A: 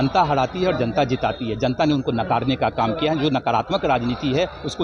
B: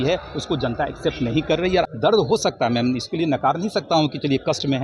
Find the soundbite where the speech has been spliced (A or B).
B